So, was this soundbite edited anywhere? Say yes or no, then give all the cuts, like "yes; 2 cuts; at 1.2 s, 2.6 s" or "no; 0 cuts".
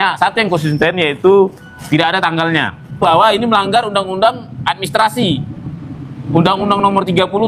yes; 1 cut; at 3.0 s